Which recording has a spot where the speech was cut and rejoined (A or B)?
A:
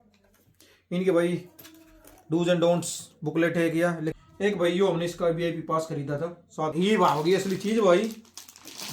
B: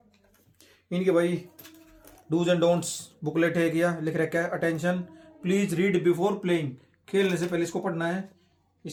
A